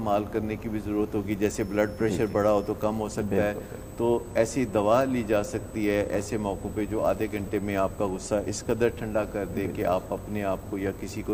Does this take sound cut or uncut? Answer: uncut